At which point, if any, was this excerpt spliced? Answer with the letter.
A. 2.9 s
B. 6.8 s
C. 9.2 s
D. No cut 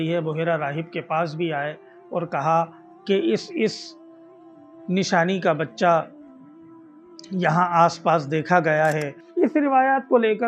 C